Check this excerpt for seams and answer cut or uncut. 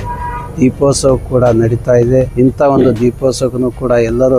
cut